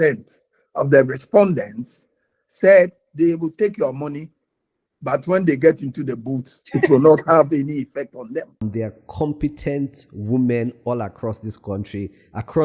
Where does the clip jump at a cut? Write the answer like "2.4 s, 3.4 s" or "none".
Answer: 8.6 s